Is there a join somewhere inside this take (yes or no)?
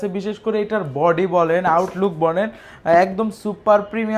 no